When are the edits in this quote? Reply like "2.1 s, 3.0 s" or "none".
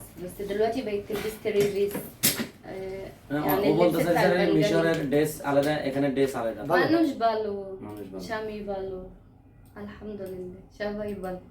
6.6 s

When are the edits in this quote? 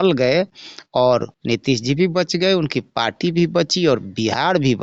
none

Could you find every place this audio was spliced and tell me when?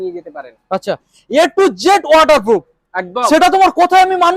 1.1 s

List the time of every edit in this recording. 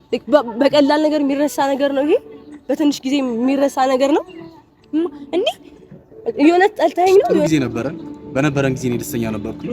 7.5 s

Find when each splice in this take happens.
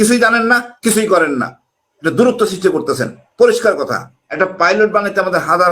4.2 s

